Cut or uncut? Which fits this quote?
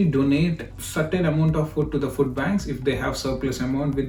uncut